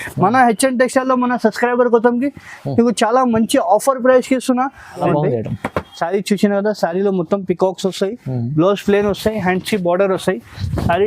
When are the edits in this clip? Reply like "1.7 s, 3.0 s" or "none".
5.0 s